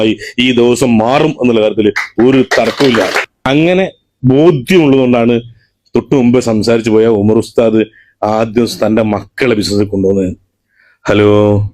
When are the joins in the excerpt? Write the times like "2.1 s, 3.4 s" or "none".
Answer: 3.3 s